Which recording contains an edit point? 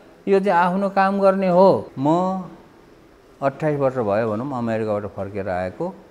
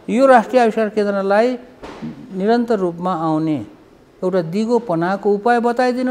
first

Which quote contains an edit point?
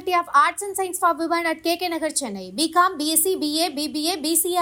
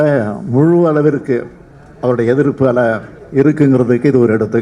second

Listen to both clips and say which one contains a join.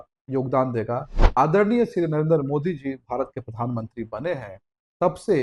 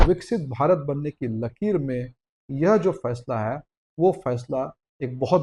first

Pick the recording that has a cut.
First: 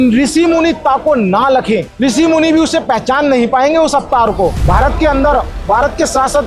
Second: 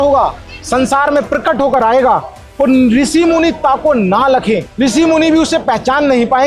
first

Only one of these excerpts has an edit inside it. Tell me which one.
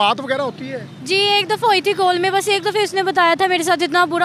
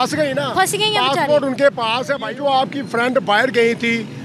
second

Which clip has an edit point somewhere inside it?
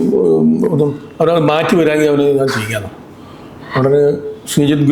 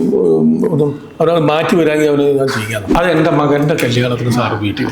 second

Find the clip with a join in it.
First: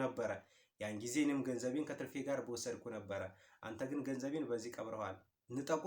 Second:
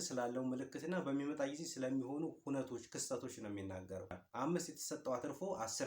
second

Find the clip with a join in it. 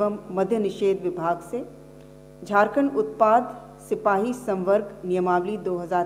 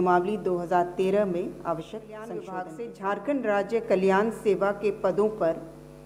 second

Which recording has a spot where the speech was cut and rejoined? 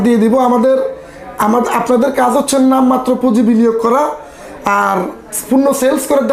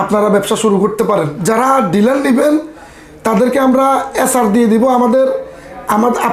second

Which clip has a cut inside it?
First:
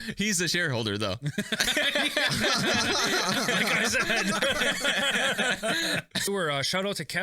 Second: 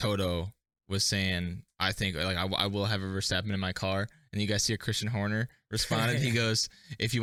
first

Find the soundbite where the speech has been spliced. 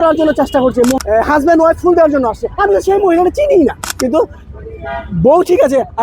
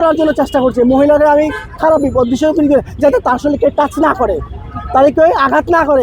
first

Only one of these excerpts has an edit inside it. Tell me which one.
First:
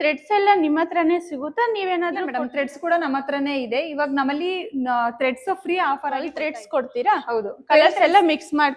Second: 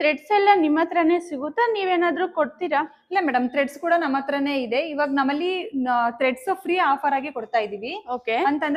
first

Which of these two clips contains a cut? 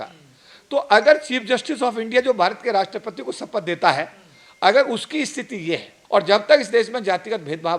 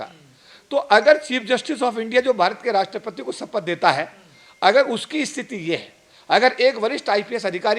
first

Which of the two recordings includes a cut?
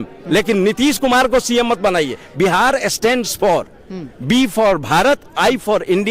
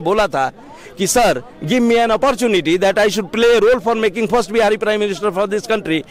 first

